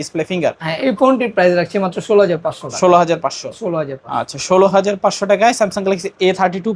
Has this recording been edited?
no; 0 cuts

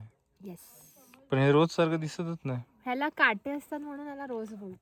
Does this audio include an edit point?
no; 0 cuts

